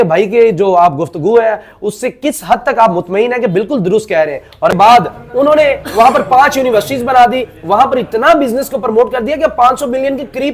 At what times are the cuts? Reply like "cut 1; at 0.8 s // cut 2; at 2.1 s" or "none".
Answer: cut 1; at 4.7 s